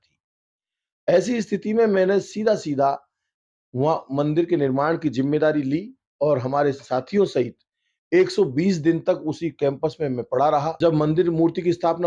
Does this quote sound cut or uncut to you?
cut